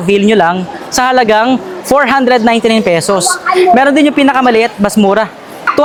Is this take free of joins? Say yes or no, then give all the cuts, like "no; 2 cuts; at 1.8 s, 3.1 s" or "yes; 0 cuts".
yes; 0 cuts